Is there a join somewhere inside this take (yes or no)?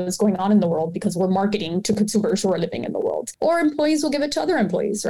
yes